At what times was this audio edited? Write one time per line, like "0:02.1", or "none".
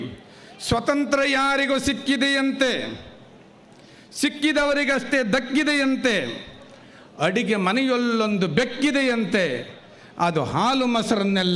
none